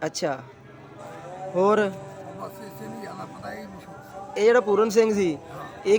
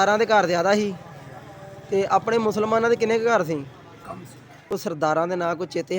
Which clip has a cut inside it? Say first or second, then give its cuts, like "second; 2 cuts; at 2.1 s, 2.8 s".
second; 1 cut; at 4.7 s